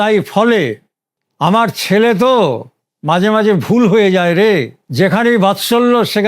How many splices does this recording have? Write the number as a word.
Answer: one